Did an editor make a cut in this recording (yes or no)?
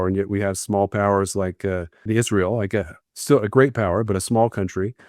yes